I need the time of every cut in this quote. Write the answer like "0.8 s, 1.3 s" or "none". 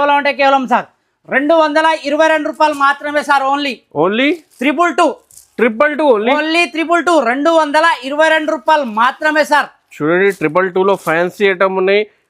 none